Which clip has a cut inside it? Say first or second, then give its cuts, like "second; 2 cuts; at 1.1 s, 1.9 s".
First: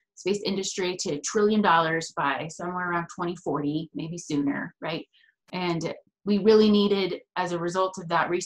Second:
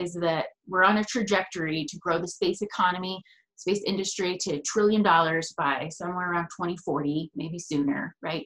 first; 1 cut; at 6.1 s